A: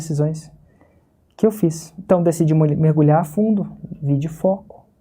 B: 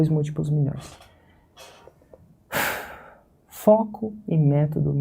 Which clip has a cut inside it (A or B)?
A